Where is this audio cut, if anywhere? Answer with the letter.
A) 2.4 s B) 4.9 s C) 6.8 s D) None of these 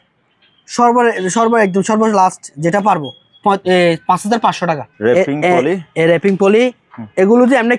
B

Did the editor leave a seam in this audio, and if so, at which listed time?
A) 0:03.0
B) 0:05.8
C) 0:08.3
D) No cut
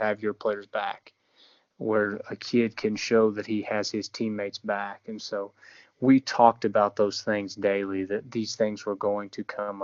D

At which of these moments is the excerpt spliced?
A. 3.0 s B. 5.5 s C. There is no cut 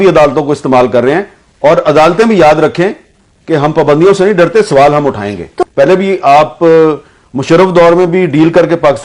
B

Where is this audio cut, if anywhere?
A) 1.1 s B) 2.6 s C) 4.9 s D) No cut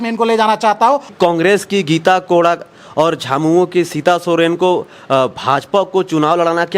A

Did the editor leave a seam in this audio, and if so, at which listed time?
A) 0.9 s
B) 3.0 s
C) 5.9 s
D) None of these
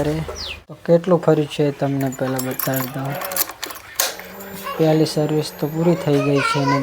A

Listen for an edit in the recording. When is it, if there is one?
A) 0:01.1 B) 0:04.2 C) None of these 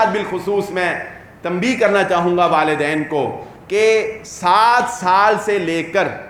C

